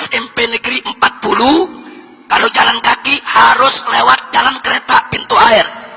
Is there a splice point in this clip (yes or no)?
no